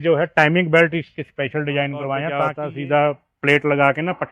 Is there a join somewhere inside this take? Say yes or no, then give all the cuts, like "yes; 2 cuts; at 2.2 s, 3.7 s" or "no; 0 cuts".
yes; 1 cut; at 2.6 s